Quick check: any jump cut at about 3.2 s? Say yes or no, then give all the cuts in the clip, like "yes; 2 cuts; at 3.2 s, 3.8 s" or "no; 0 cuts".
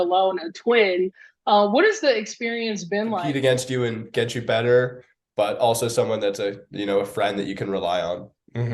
yes; 1 cut; at 3.2 s